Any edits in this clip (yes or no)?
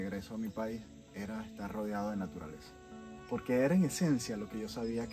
no